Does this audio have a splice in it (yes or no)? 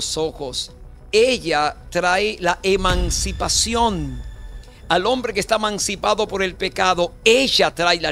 no